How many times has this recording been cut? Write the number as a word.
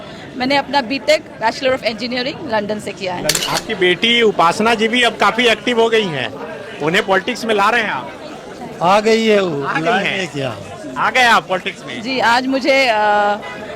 one